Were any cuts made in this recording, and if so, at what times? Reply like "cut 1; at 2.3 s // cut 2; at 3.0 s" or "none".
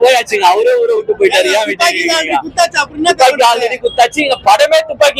none